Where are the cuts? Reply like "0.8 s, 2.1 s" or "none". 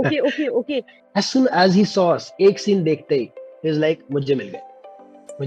1.0 s

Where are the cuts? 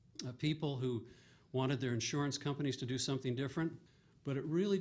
1.9 s

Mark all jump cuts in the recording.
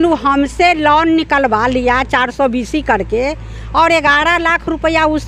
none

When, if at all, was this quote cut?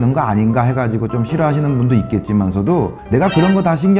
none

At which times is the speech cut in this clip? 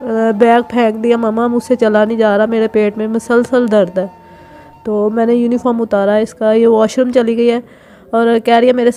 none

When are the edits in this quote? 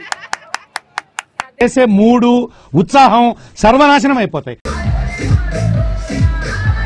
none

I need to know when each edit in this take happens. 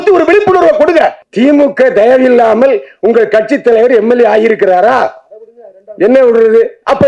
1.2 s

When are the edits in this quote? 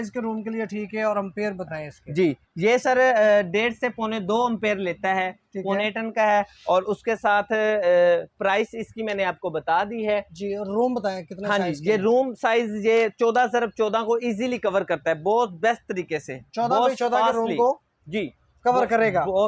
none

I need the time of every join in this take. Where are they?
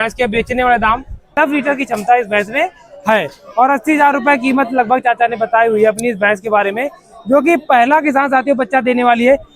1.3 s

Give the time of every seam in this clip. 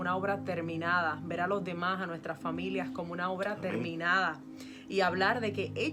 none

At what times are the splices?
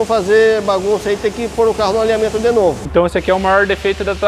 2.8 s

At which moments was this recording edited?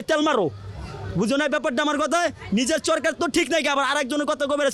none

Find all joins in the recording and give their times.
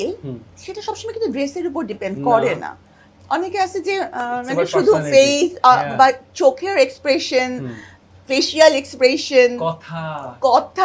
none

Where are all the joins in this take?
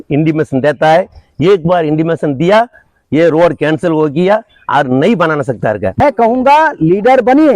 6.0 s

